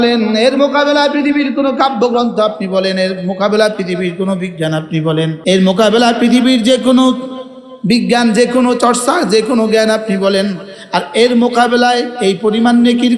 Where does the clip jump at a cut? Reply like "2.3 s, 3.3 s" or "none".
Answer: 5.4 s